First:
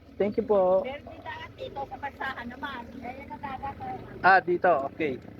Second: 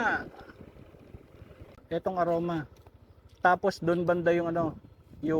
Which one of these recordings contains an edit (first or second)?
second